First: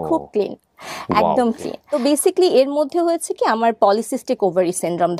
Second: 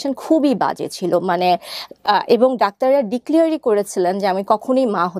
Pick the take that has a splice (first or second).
first